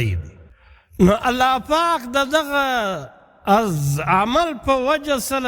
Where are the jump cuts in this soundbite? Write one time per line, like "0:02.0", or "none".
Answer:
0:01.0